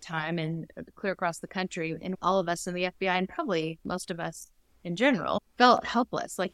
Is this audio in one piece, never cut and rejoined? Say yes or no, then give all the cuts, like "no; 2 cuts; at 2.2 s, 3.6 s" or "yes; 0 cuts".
no; 2 cuts; at 2.0 s, 5.5 s